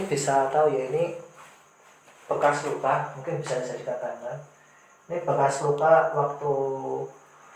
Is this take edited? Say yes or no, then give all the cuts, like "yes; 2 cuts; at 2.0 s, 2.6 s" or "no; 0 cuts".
no; 0 cuts